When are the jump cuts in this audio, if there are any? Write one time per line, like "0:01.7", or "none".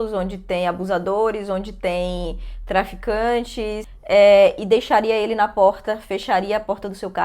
0:03.9